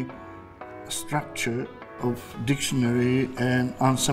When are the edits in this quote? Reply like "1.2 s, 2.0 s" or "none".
none